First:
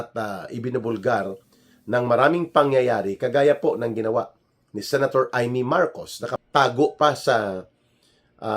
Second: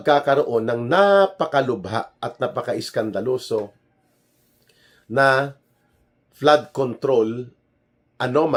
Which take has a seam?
first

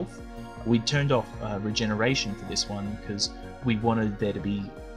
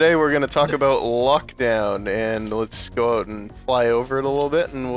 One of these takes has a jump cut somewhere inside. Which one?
second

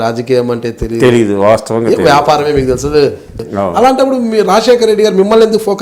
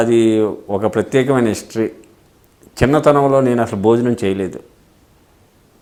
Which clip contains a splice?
first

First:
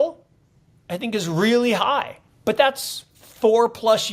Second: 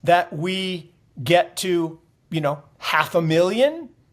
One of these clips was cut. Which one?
first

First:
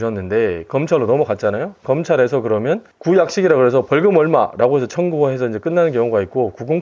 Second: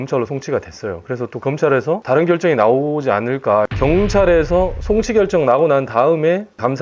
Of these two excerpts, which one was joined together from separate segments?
second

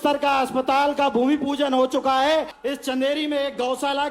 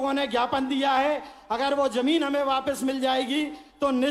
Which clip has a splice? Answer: first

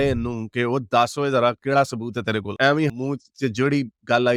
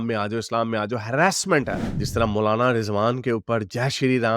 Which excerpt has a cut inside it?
second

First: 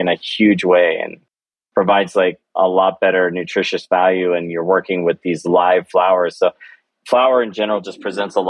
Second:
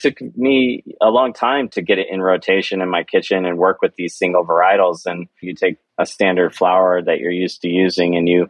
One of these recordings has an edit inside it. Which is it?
second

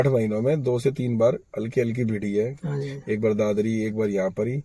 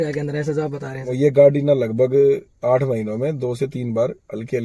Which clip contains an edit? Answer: second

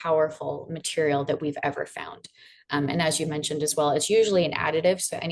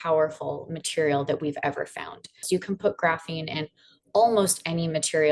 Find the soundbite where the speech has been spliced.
second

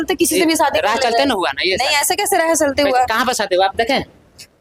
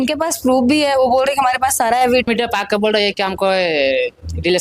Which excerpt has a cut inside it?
second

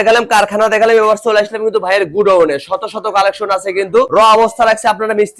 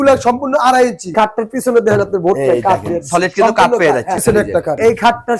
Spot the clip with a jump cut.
second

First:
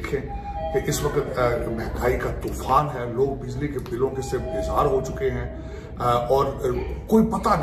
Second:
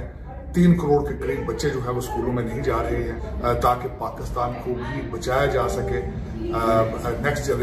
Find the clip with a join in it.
second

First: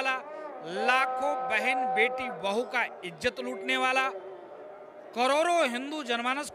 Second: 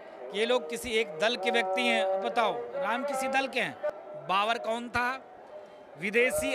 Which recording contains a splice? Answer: second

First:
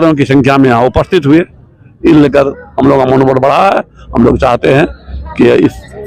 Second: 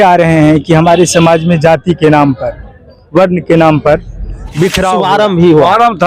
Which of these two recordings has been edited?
second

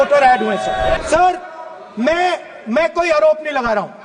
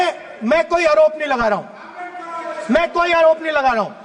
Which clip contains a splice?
first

